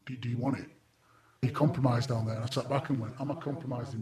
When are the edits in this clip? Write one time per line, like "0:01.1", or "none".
0:01.4
0:02.5